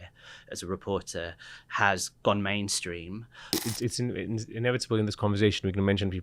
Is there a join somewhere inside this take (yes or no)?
yes